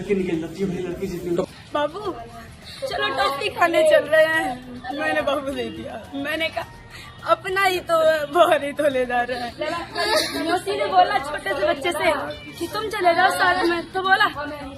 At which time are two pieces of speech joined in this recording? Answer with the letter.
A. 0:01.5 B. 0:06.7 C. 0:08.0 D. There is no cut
A